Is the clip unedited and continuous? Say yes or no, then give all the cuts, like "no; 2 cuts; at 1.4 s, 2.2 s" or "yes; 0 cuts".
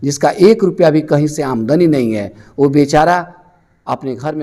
yes; 0 cuts